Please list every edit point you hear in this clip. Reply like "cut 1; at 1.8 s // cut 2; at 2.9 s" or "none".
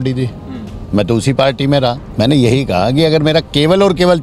cut 1; at 2.0 s